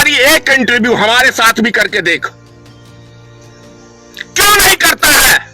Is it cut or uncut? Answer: uncut